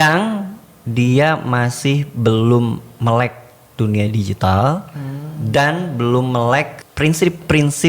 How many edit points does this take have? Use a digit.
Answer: 1